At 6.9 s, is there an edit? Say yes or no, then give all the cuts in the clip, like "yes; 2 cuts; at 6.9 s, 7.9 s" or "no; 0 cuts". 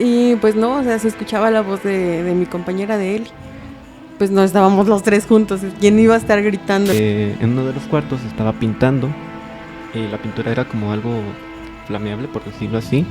yes; 1 cut; at 6.9 s